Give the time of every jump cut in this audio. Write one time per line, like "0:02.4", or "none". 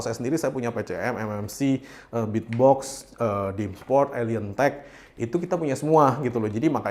none